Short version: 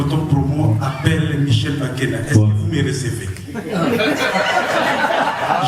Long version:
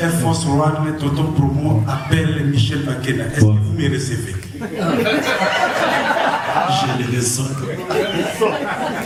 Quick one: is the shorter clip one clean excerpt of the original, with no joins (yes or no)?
yes